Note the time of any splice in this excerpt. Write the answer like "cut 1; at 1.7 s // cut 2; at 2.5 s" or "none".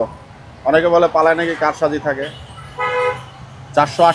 none